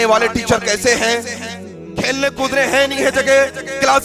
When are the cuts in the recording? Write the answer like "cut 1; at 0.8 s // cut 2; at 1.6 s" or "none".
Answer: cut 1; at 1.8 s